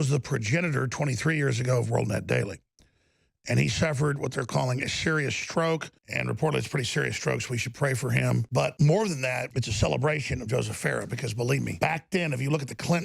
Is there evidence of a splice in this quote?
yes; 4 cuts; at 6.0 s, 8.6 s, 9.5 s, 11.7 s

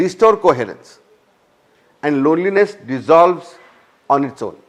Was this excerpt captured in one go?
yes; 0 cuts

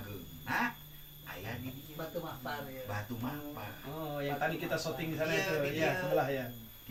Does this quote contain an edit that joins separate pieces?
no; 0 cuts

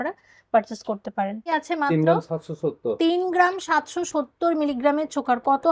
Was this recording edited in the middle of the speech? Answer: yes; 1 cut; at 1.5 s

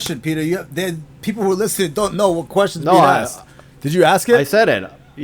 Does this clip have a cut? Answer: no; 0 cuts

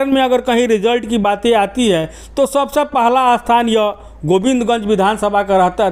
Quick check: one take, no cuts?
yes; 0 cuts

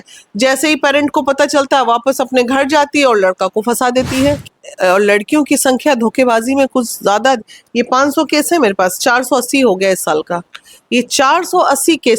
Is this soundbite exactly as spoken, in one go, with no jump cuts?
no; 1 cut; at 4.4 s

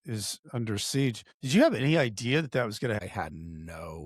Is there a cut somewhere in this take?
yes; 2 cuts; at 1.3 s, 3.0 s

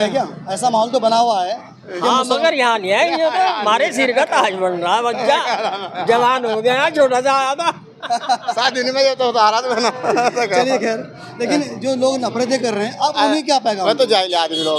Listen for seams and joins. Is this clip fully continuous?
yes; 0 cuts

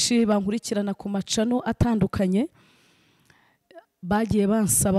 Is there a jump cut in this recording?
no; 0 cuts

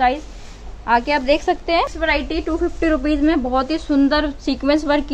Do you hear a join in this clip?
yes; 1 cut; at 1.9 s

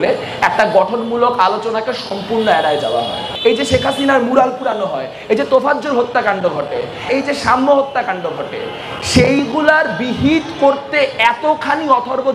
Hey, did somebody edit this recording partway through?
yes; 1 cut; at 3.2 s

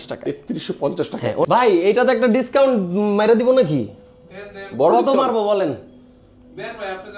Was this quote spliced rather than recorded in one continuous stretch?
yes; 1 cut; at 1.5 s

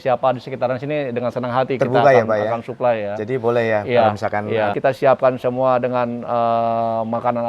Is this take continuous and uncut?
no; 1 cut; at 4.7 s

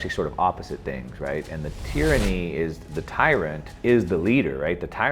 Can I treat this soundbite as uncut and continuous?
no; 1 cut; at 3.7 s

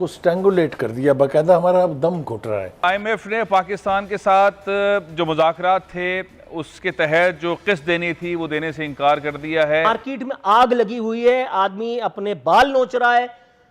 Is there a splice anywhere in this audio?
yes; 2 cuts; at 2.8 s, 9.9 s

